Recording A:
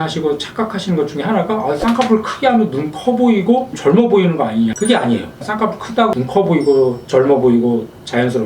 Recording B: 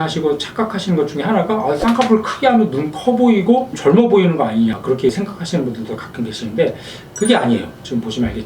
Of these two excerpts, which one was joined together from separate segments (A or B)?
A